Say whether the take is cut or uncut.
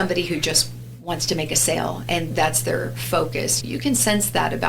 cut